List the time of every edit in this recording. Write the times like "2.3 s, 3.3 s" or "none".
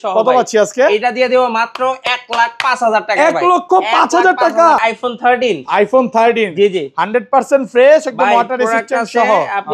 4.8 s